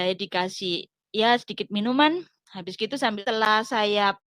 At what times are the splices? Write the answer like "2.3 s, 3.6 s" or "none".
3.1 s